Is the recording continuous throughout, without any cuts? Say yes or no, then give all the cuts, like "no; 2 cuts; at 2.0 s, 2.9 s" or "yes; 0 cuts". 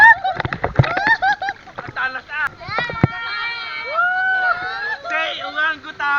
no; 1 cut; at 2.6 s